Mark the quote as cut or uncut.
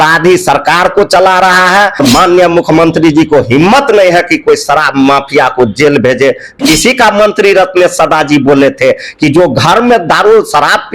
cut